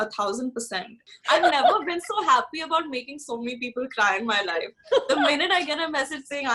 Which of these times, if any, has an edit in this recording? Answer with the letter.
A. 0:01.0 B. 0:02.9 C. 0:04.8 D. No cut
A